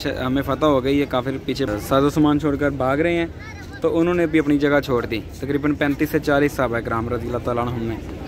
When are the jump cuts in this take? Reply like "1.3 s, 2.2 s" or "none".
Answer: 1.7 s